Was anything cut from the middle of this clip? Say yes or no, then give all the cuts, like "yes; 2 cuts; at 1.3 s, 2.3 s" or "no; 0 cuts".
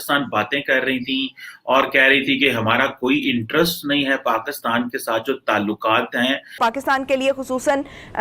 yes; 1 cut; at 6.6 s